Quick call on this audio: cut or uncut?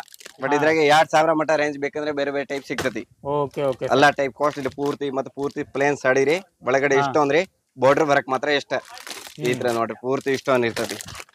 uncut